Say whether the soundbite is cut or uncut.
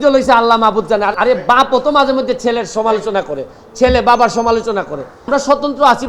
cut